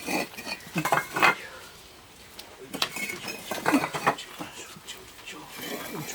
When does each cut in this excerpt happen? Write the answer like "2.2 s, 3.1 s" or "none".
none